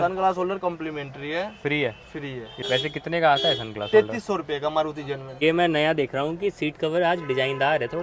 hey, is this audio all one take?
no; 2 cuts; at 2.6 s, 5.3 s

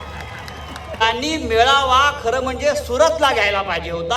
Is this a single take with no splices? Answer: no; 1 cut; at 1.0 s

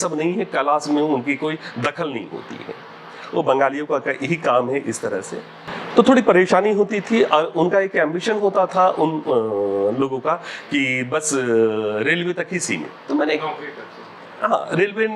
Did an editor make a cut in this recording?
no; 0 cuts

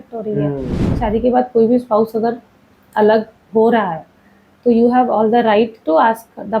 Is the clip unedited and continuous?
no; 1 cut; at 0.9 s

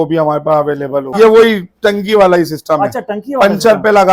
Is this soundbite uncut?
no; 1 cut; at 1.1 s

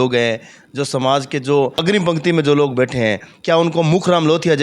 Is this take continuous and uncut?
no; 1 cut; at 1.8 s

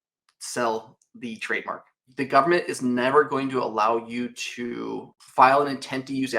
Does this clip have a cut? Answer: yes; 1 cut; at 2.1 s

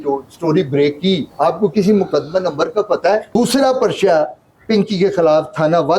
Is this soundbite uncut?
no; 2 cuts; at 1.3 s, 3.4 s

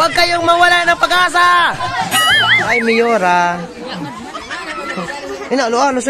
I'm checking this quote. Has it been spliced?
yes; 1 cut; at 2.6 s

